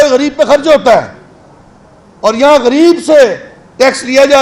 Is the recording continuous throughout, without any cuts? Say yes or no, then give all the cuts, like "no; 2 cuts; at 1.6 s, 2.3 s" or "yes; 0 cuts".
yes; 0 cuts